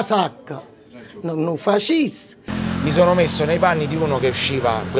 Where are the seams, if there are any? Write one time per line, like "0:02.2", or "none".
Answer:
0:02.5